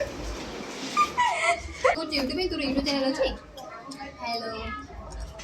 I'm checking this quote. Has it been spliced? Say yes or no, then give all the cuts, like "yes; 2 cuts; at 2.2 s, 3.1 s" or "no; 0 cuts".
yes; 1 cut; at 2.0 s